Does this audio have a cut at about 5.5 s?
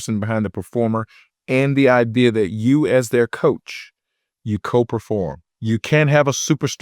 yes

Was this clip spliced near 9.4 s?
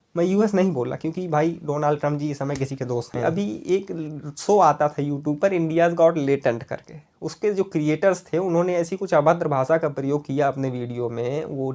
no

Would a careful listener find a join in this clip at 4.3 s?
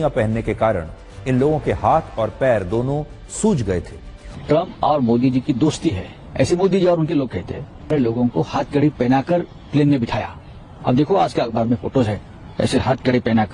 yes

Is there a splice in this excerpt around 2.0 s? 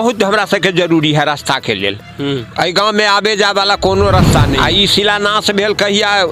no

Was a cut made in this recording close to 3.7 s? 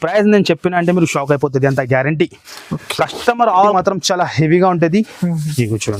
yes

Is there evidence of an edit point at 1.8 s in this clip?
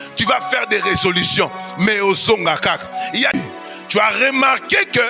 no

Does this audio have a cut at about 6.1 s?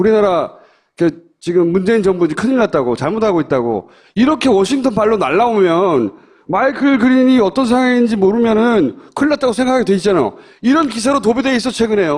no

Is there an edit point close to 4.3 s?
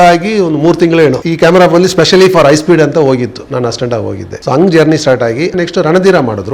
yes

